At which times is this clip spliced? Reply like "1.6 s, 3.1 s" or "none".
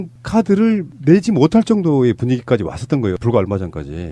1.0 s